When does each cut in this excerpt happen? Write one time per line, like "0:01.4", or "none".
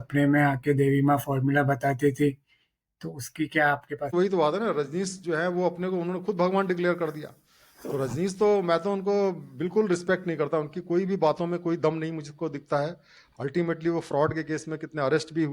0:04.1